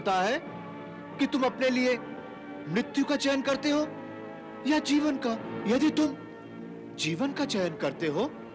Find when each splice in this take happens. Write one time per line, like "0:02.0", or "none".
0:05.5